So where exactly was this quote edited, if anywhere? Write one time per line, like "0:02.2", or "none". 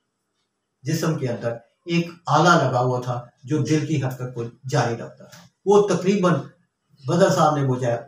none